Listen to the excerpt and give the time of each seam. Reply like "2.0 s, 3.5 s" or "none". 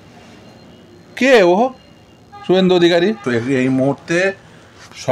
3.2 s